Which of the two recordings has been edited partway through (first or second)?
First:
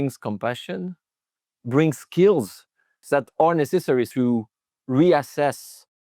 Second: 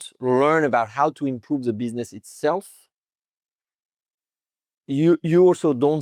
first